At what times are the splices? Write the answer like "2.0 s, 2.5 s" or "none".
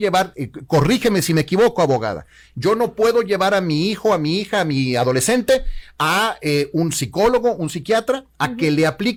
none